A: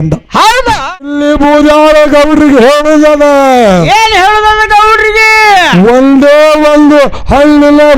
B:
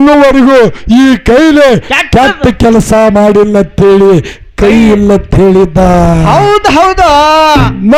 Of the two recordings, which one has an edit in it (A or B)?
A